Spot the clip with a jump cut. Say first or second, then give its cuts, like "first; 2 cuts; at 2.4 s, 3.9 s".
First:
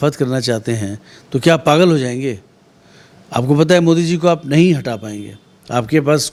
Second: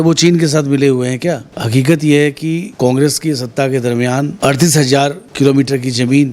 second; 4 cuts; at 1.5 s, 2.7 s, 4.3 s, 5.2 s